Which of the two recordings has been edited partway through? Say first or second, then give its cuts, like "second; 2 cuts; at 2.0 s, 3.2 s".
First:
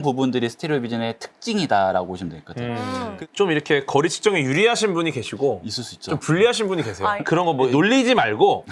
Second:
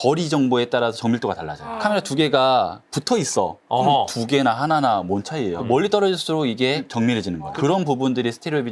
first; 1 cut; at 3.2 s